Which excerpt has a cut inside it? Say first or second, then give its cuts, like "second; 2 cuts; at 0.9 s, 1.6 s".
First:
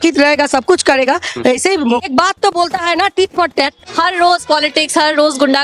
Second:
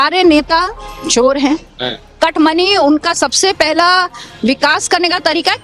first; 2 cuts; at 2.0 s, 3.8 s